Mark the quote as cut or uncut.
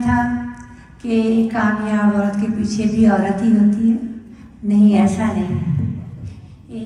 uncut